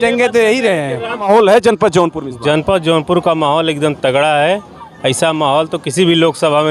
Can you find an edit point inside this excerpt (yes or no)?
yes